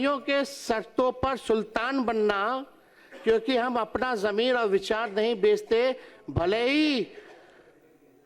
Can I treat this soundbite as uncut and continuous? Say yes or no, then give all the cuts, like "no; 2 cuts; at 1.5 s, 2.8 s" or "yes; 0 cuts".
yes; 0 cuts